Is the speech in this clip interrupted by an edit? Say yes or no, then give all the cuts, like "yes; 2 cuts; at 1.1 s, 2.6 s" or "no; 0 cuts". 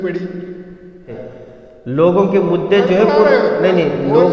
yes; 1 cut; at 1.1 s